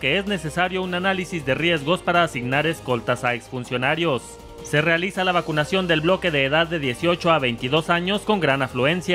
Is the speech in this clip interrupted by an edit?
yes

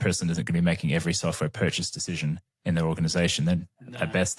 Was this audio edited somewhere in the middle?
no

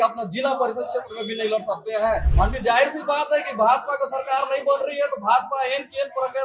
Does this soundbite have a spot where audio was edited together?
yes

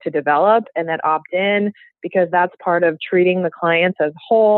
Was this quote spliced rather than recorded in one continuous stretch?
no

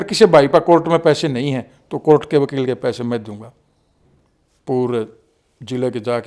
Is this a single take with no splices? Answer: yes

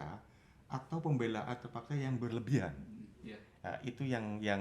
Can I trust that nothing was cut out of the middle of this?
yes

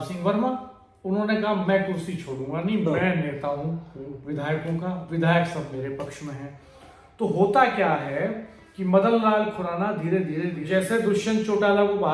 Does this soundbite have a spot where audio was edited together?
yes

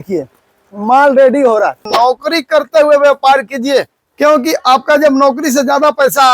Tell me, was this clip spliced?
yes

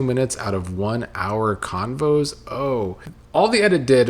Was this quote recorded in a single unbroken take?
no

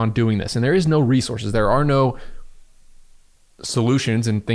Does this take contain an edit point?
no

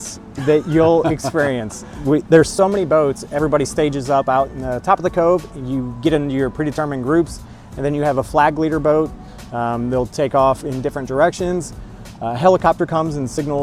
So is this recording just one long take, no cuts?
yes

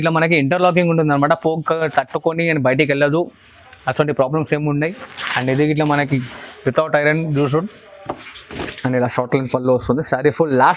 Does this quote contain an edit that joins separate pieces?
yes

